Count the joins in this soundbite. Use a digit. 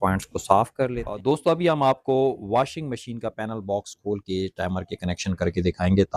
1